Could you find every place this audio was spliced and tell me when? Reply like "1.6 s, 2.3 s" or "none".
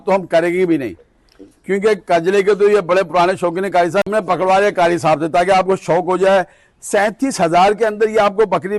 4.1 s